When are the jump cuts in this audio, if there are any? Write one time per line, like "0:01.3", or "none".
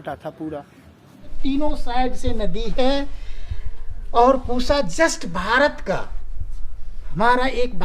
0:01.4